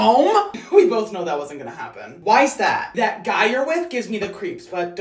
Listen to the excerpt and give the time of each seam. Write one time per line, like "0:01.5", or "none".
none